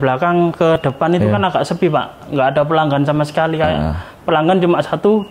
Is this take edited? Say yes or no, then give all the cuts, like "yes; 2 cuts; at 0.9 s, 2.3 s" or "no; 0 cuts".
no; 0 cuts